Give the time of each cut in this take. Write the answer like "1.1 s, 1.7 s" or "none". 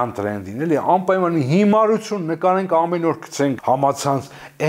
3.6 s